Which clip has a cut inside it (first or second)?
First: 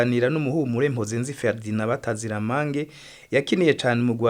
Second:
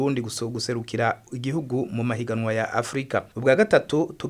second